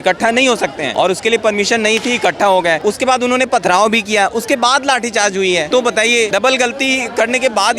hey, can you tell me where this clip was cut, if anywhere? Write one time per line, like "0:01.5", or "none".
0:00.8
0:02.8
0:06.1